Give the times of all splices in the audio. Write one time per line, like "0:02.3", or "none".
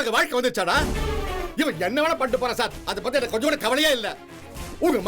0:01.4